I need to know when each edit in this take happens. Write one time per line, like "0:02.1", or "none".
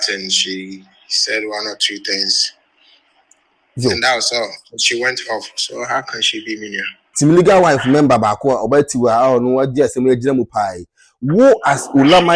0:07.0